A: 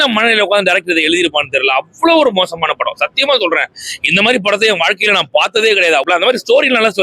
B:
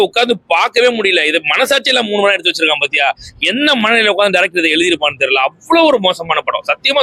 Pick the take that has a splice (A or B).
A